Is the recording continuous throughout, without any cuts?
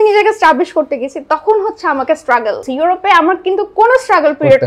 no; 1 cut; at 2.7 s

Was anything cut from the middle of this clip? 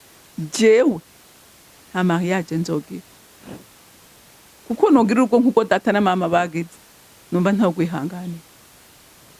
no; 0 cuts

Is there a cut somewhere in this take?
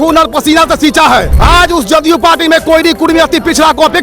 yes; 1 cut; at 1.3 s

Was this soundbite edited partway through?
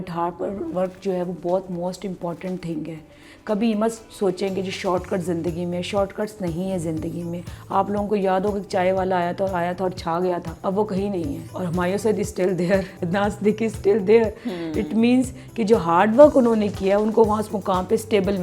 yes; 3 cuts; at 10.5 s, 11.5 s, 13.0 s

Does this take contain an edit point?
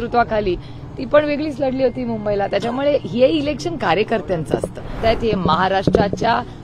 yes; 1 cut; at 5.0 s

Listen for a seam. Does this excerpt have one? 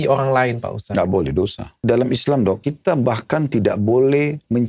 yes; 2 cuts; at 1.7 s, 2.7 s

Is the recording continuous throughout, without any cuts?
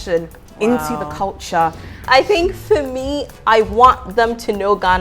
no; 1 cut; at 2.0 s

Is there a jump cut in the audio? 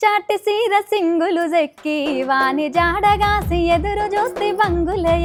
no; 0 cuts

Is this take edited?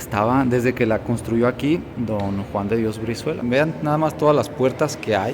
yes; 1 cut; at 3.4 s

